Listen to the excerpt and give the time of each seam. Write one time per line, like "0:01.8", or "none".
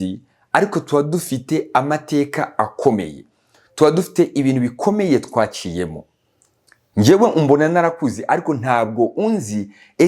none